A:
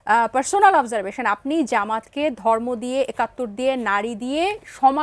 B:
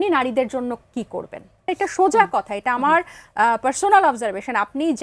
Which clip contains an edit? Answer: B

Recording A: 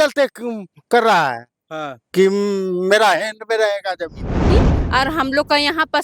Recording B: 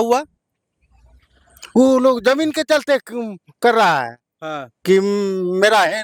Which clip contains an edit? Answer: A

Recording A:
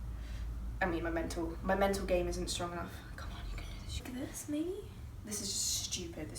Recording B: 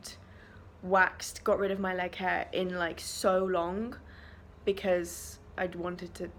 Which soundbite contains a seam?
A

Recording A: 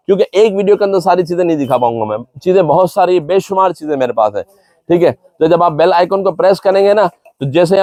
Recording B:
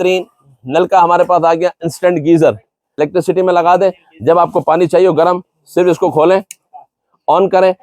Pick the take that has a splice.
B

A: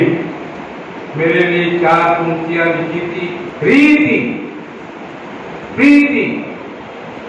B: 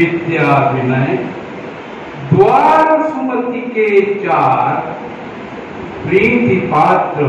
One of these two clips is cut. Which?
A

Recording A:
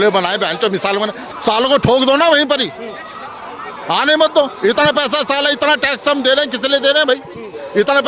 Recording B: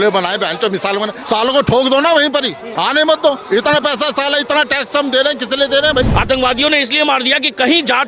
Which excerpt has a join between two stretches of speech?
B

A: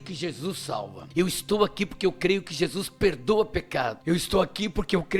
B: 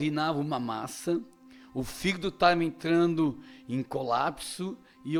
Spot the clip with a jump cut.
A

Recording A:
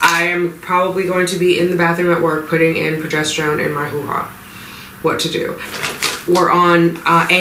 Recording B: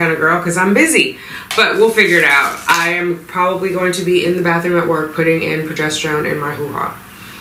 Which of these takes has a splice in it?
A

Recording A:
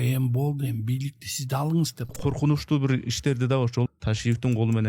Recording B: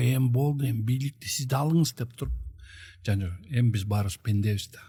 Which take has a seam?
A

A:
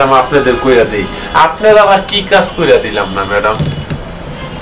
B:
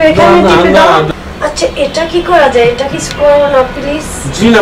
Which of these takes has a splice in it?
B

